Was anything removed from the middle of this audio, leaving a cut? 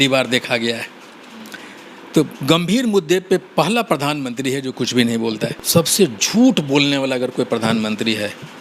yes; 1 cut; at 5.6 s

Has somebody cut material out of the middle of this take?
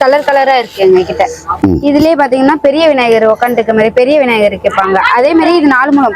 yes; 1 cut; at 1.6 s

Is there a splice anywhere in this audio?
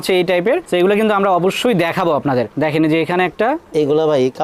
no; 0 cuts

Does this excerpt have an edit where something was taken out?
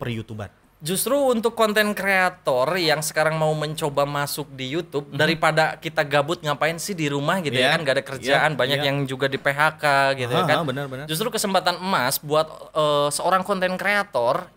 no; 0 cuts

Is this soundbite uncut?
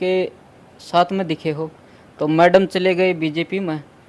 yes; 0 cuts

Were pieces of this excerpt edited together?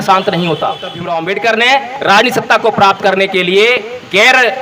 yes; 1 cut; at 0.9 s

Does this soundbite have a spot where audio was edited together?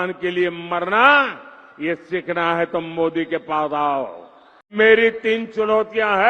yes; 1 cut; at 4.7 s

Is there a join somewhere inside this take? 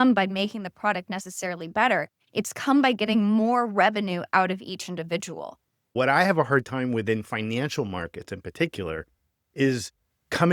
yes; 1 cut; at 5.9 s

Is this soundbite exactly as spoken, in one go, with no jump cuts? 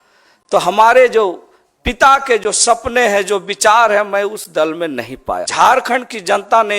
no; 1 cut; at 5.5 s

